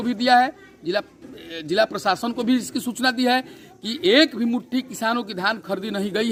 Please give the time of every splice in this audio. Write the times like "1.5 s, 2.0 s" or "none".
none